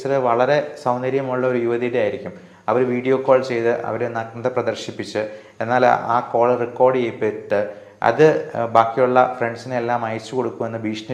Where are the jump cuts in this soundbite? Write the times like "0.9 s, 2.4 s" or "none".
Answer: none